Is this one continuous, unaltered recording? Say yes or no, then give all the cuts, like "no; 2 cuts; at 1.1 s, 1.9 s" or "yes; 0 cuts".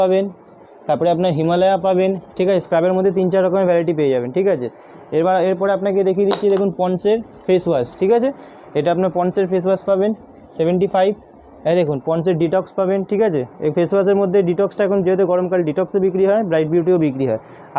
yes; 0 cuts